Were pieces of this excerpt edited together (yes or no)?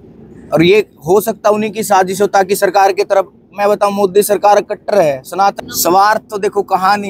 yes